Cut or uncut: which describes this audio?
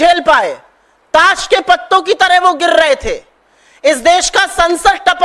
uncut